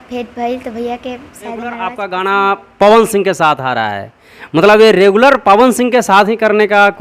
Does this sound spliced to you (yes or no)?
yes